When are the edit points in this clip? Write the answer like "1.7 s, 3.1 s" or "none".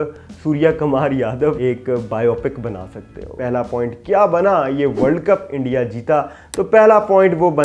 1.6 s, 3.3 s